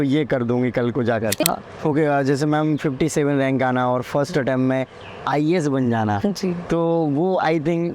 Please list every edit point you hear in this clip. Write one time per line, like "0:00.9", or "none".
0:01.6